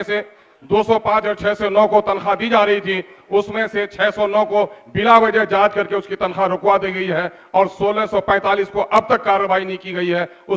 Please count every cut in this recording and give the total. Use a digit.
0